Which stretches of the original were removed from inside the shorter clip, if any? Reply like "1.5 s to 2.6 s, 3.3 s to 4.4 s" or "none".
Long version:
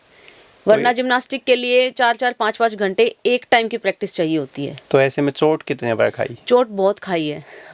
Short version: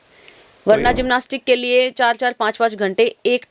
none